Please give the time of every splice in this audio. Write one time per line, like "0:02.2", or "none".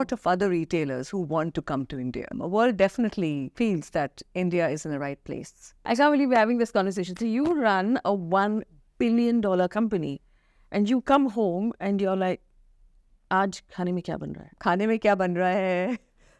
0:02.4
0:03.5
0:05.9
0:14.5